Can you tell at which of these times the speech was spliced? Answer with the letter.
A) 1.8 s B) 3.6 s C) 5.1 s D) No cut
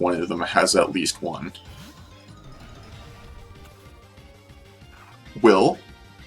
C